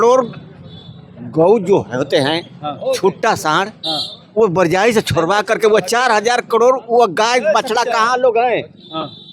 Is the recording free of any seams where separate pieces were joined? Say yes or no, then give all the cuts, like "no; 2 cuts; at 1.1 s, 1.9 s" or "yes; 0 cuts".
yes; 0 cuts